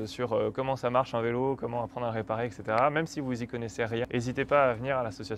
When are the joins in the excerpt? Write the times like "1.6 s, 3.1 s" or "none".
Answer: 4.1 s